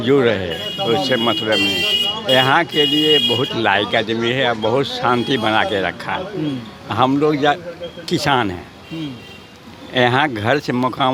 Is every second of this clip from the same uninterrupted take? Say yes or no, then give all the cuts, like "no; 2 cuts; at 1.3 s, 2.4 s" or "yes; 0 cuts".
yes; 0 cuts